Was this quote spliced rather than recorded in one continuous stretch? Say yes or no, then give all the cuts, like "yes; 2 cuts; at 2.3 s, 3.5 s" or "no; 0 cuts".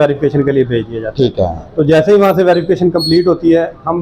no; 0 cuts